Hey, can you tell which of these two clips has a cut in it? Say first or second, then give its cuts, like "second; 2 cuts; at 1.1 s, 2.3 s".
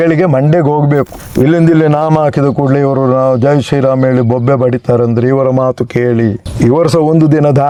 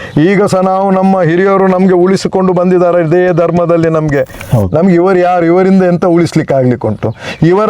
second; 1 cut; at 4.4 s